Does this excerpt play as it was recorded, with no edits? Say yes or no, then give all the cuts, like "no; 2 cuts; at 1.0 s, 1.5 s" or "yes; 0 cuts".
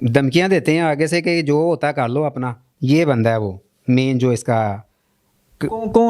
no; 1 cut; at 2.7 s